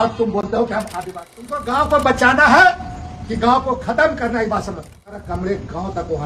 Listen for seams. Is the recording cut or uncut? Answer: cut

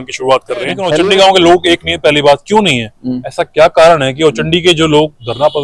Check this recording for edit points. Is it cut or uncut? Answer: cut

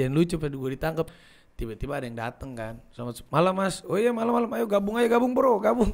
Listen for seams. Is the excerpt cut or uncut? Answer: cut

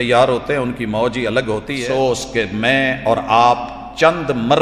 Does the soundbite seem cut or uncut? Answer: cut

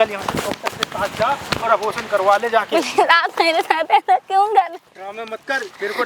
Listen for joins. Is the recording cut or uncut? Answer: uncut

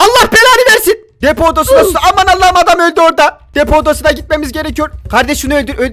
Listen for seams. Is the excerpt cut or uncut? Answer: uncut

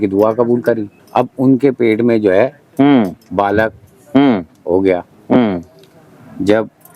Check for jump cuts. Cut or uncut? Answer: cut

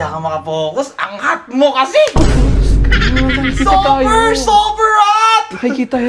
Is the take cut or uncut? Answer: uncut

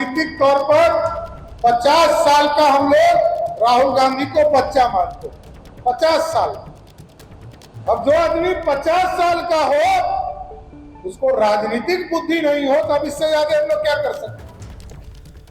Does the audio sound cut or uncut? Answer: cut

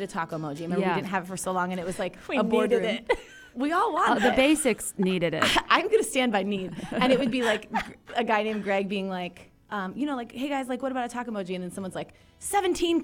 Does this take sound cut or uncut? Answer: uncut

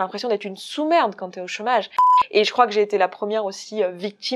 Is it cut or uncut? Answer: cut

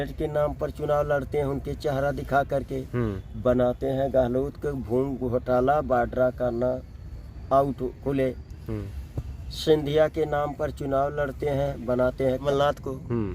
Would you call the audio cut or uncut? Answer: cut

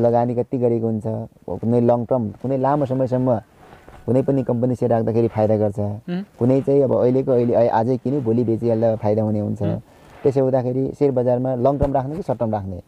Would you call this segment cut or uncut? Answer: uncut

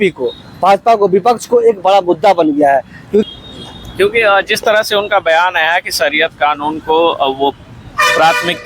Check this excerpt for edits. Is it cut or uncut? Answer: cut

